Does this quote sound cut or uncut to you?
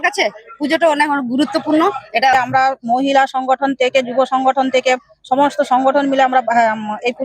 cut